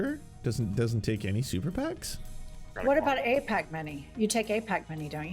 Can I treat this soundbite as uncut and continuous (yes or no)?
no